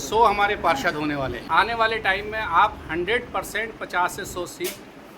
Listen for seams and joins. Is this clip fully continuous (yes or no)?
no